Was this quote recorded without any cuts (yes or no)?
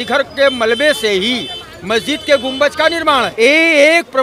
no